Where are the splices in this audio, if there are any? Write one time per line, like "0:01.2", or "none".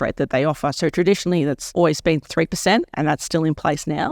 0:01.6